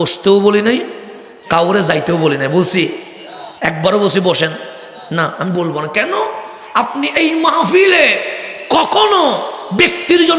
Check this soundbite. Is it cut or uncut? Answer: uncut